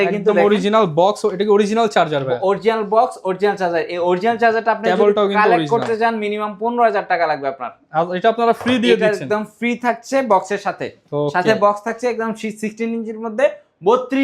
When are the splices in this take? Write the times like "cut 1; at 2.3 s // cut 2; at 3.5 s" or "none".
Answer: none